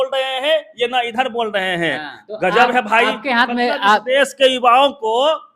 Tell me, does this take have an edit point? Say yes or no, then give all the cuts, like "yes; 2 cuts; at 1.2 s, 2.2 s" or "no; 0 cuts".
yes; 1 cut; at 2.1 s